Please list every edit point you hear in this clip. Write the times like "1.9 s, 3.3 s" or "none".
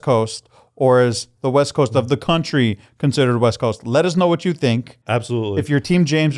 4.9 s